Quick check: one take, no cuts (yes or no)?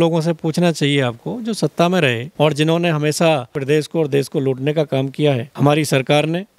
no